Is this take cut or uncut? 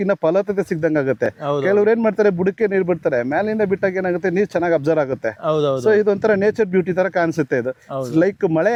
uncut